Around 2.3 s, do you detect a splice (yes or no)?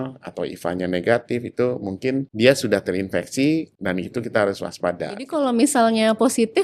yes